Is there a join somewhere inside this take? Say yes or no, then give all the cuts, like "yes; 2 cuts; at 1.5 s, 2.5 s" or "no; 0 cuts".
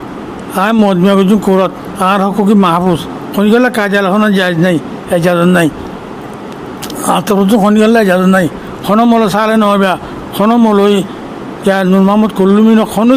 no; 0 cuts